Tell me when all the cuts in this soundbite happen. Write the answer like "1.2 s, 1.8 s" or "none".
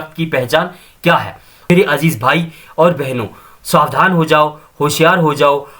1.7 s